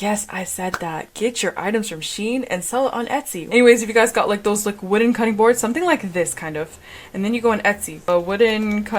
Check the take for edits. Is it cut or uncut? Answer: cut